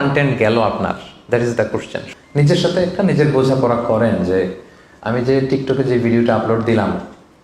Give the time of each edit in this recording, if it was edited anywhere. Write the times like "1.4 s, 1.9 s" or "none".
2.0 s

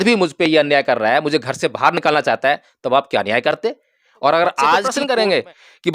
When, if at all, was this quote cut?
4.9 s

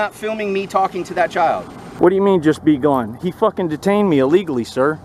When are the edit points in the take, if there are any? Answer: 1.8 s

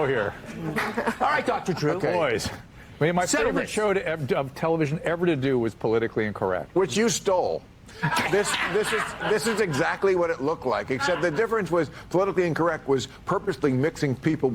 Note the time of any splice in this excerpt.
3.5 s

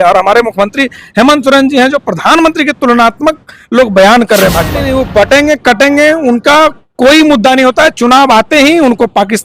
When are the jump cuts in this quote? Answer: 4.8 s

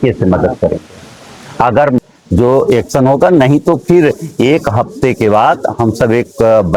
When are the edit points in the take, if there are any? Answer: 2.0 s

